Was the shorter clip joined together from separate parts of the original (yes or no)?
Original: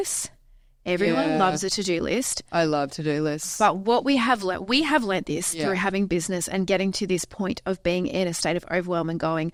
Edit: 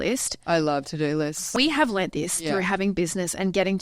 yes